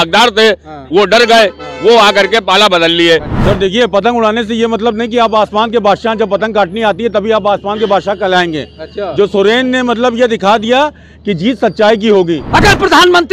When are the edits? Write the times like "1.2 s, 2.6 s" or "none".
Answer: 3.3 s, 12.4 s